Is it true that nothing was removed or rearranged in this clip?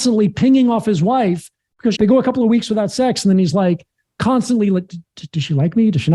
no; 1 cut; at 1.9 s

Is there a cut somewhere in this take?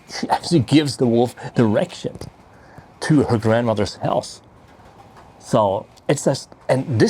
no; 0 cuts

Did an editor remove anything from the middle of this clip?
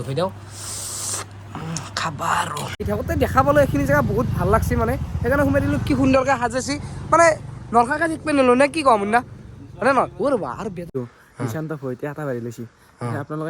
yes; 2 cuts; at 2.9 s, 11.0 s

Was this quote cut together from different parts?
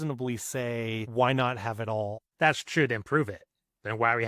yes; 2 cuts; at 1.1 s, 2.2 s

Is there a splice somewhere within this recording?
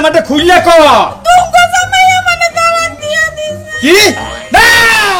no; 0 cuts

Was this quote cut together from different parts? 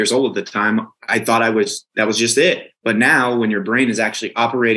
yes; 3 cuts; at 1.0 s, 1.8 s, 2.7 s

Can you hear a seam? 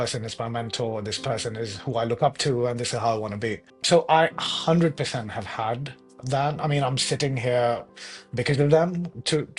yes; 1 cut; at 3.8 s

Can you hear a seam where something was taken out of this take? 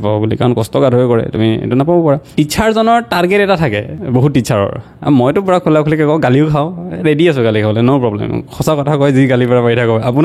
yes; 2 cuts; at 2.3 s, 3.9 s

